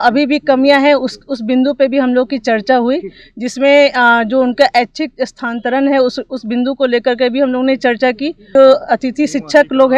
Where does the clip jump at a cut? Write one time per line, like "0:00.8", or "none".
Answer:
0:08.5